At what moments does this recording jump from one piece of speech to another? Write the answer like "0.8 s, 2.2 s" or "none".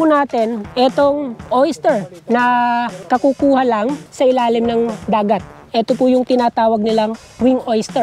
none